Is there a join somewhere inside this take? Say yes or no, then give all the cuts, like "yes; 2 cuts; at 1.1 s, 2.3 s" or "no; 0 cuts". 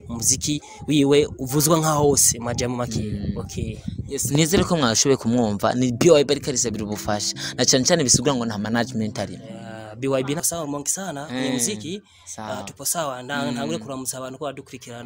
yes; 1 cut; at 10.4 s